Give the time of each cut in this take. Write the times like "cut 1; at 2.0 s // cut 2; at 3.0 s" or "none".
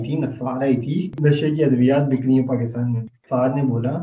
cut 1; at 1.1 s // cut 2; at 3.1 s